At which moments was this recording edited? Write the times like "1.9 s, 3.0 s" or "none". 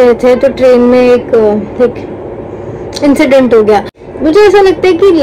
4.1 s